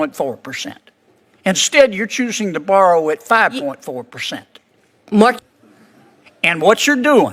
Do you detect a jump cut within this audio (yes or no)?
yes